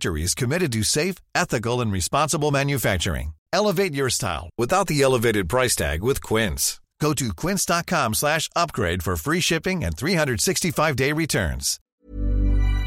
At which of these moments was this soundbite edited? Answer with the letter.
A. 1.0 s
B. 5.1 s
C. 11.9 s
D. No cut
C